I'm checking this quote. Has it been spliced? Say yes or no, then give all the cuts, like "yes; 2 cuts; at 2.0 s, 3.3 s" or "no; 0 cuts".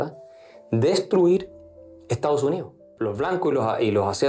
yes; 1 cut; at 2.9 s